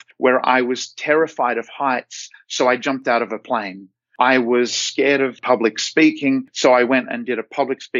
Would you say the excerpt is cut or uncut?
uncut